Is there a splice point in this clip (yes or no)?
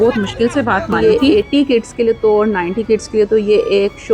yes